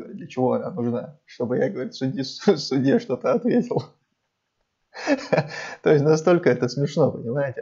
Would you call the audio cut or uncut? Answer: uncut